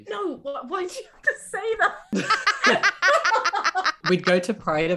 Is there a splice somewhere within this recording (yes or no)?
yes